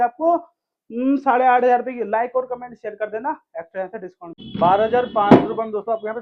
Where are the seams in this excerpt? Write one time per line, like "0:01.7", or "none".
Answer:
0:04.4